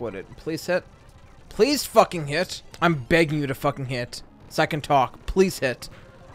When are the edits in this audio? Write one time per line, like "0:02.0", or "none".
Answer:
0:02.6